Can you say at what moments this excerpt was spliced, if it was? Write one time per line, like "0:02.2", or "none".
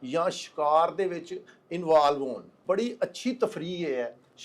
0:02.6